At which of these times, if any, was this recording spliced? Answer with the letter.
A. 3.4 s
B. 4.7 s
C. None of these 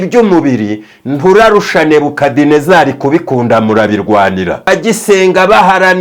B